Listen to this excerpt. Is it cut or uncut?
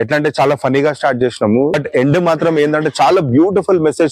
cut